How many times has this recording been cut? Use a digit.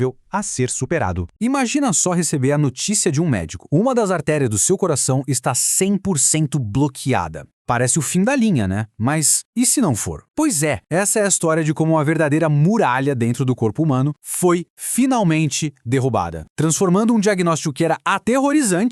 1